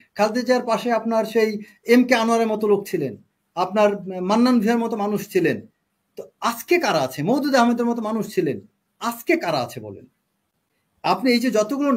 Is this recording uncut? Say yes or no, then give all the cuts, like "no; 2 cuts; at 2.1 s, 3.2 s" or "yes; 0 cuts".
yes; 0 cuts